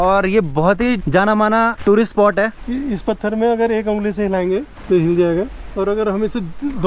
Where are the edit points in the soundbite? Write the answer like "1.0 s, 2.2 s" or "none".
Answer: 1.8 s, 2.6 s, 4.7 s, 5.7 s